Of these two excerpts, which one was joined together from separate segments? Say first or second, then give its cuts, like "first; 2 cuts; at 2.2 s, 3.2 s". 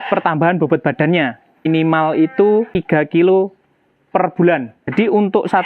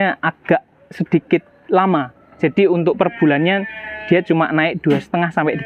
first; 3 cuts; at 1.7 s, 2.7 s, 4.9 s